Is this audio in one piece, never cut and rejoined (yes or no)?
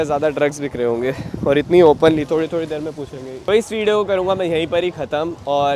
yes